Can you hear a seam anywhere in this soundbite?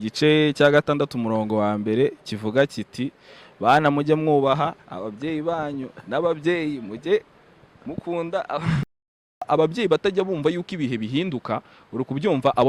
yes; 1 cut; at 9.5 s

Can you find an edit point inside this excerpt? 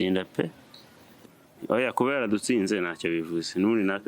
yes; 1 cut; at 1.1 s

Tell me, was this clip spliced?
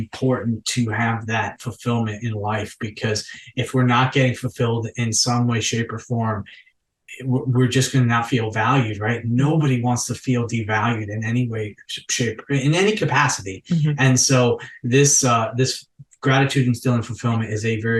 no; 0 cuts

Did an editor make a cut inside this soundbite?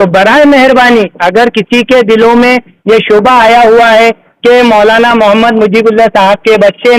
no; 0 cuts

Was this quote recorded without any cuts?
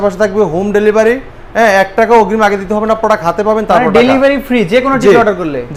yes; 0 cuts

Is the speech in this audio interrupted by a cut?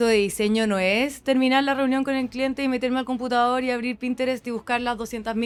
no; 0 cuts

